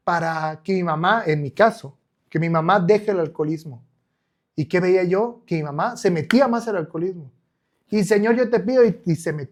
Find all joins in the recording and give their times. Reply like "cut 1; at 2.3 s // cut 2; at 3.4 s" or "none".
none